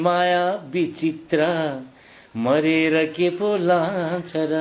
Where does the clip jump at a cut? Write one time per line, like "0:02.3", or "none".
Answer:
none